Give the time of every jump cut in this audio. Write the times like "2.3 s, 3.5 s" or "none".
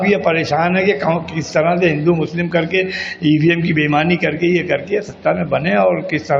none